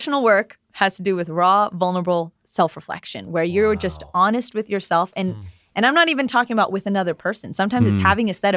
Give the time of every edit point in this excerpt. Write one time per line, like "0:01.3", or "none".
0:02.4